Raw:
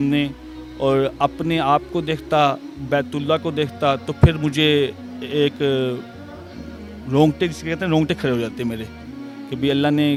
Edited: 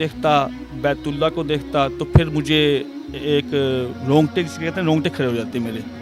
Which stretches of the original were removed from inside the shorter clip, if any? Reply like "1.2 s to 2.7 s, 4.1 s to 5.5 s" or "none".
6.0 s to 7.0 s